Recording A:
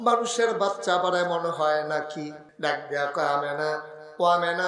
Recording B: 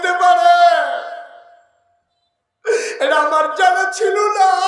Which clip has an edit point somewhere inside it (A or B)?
A